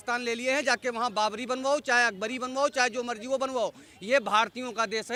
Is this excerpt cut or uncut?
uncut